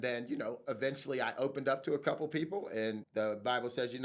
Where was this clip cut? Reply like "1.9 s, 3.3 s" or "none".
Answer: 3.0 s